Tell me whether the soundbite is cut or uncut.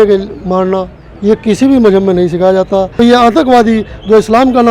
cut